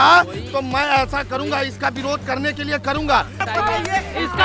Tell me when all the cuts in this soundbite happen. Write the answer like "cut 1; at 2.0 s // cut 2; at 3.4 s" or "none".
cut 1; at 3.4 s